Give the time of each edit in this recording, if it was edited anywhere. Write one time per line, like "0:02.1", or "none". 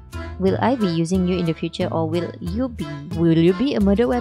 0:03.0